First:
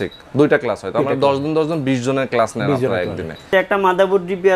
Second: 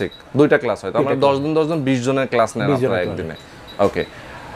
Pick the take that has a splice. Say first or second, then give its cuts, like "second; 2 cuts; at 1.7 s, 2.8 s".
first; 1 cut; at 3.5 s